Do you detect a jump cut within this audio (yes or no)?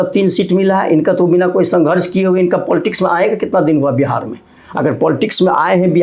no